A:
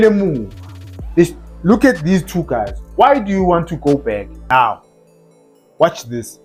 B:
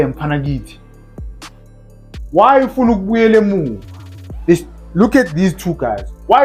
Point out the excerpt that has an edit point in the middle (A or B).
A